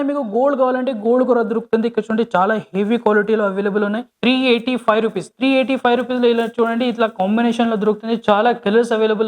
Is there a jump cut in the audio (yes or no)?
yes